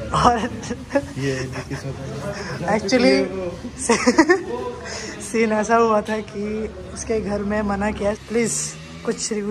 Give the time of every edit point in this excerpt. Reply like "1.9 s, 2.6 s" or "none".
8.2 s